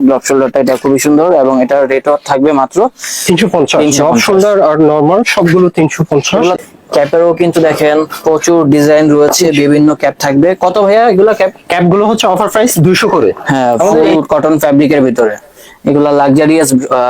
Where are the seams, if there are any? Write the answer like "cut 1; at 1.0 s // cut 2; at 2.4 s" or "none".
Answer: cut 1; at 6.6 s // cut 2; at 13.4 s